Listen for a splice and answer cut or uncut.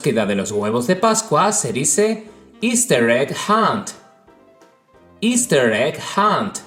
uncut